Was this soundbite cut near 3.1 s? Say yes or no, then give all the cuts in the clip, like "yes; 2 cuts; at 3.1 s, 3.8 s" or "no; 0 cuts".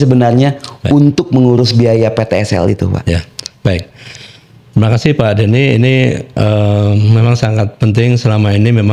no; 0 cuts